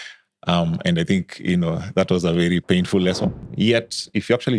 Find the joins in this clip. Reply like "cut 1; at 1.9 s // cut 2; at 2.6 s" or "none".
cut 1; at 3.5 s

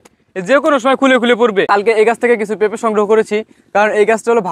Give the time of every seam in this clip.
cut 1; at 1.7 s

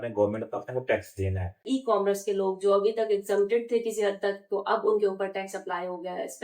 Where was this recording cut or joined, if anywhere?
cut 1; at 1.6 s

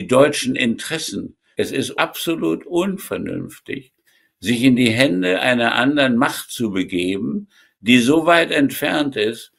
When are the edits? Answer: cut 1; at 1.5 s

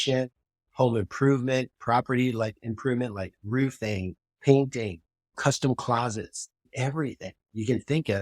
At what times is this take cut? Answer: cut 1; at 6.6 s

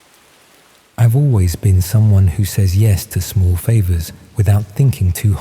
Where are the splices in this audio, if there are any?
cut 1; at 0.9 s

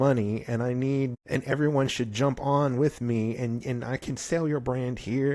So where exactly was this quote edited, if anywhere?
cut 1; at 1.2 s

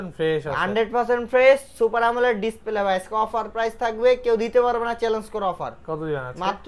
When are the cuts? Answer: none

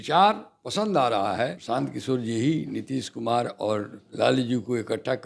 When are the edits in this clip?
cut 1; at 1.6 s // cut 2; at 4.0 s

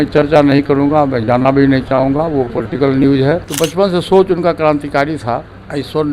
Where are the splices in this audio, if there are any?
cut 1; at 3.5 s

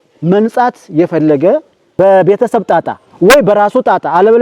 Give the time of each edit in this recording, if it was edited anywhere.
cut 1; at 1.8 s

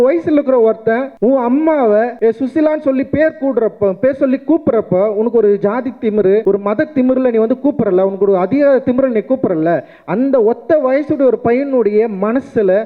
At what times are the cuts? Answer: cut 1; at 1.1 s // cut 2; at 2.1 s // cut 3; at 6.4 s

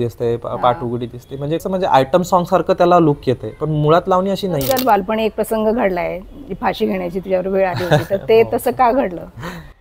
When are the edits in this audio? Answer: cut 1; at 1.6 s // cut 2; at 4.7 s

